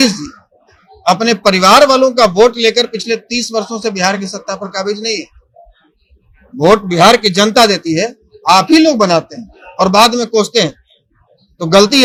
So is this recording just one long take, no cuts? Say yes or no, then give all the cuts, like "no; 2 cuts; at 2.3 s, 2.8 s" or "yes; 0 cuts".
yes; 0 cuts